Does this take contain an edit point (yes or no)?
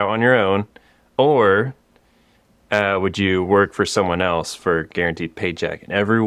no